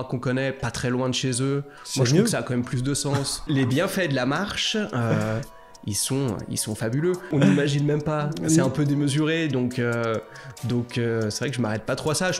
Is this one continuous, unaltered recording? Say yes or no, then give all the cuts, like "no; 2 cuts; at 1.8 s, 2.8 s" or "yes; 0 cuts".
no; 2 cuts; at 3.4 s, 7.3 s